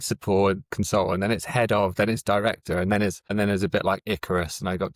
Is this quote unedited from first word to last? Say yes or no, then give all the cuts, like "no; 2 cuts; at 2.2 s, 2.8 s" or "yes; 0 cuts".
no; 1 cut; at 3.2 s